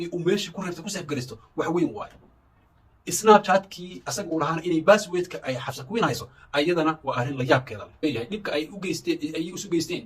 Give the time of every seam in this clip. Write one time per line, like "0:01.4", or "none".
0:08.0